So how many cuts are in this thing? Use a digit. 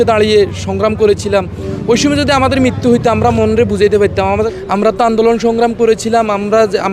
1